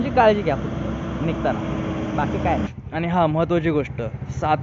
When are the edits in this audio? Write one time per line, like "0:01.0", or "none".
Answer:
0:02.8